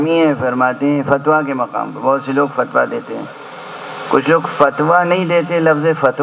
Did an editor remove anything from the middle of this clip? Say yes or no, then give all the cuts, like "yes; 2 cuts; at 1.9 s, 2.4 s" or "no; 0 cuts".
no; 0 cuts